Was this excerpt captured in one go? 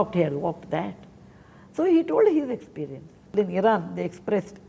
no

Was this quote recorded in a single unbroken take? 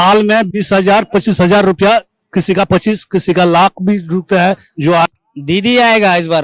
no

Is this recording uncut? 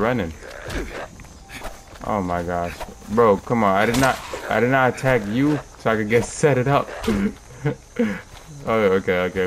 yes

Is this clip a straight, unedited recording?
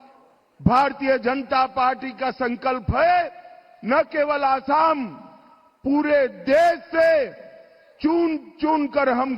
no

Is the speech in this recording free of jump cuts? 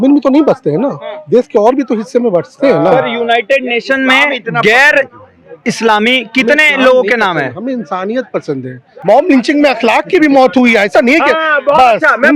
no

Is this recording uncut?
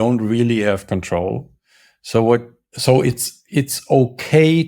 yes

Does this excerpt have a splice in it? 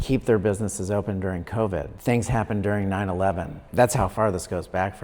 yes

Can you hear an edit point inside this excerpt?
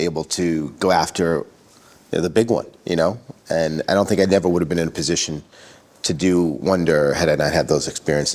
no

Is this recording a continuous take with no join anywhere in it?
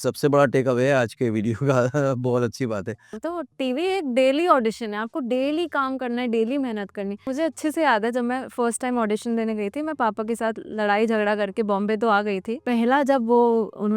no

